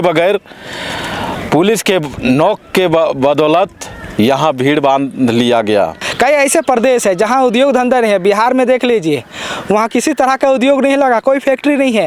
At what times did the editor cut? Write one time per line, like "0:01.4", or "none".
0:06.0